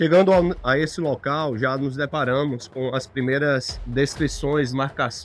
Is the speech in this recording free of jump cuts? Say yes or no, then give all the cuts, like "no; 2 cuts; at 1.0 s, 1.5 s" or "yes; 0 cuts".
yes; 0 cuts